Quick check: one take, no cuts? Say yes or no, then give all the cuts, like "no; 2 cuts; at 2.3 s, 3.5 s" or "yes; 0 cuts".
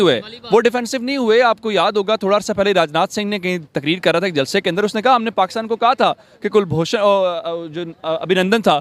yes; 0 cuts